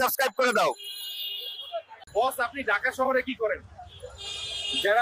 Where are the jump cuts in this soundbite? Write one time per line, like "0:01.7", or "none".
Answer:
0:01.9